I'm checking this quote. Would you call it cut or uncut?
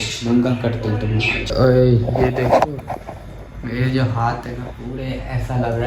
cut